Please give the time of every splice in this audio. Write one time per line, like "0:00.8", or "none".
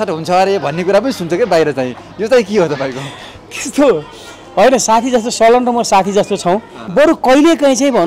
0:06.8